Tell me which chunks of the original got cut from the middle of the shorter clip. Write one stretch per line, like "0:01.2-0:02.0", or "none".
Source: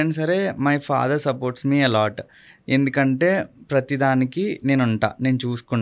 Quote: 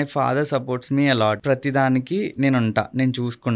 0:02.1-0:03.7

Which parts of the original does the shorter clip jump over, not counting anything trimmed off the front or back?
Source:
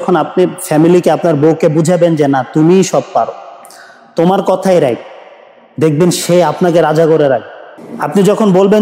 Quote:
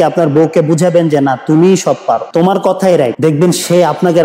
0:03.3-0:04.1
0:05.0-0:05.7

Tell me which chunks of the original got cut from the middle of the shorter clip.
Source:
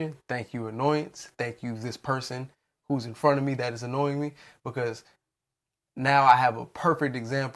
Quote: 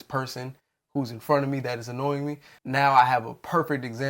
0:04.4-0:05.8

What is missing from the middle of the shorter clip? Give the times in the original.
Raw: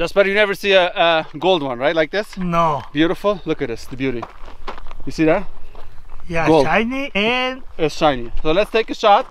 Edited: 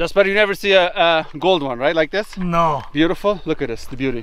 none

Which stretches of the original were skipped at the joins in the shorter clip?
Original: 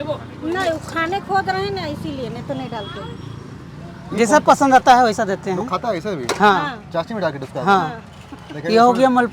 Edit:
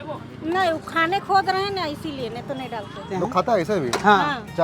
0:03.1-0:05.4

